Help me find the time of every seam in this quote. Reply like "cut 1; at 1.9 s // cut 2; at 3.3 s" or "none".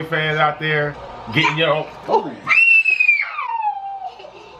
none